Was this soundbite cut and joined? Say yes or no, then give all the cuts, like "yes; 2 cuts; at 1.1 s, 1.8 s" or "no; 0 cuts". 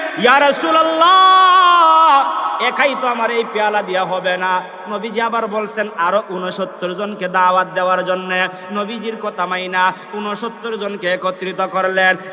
no; 0 cuts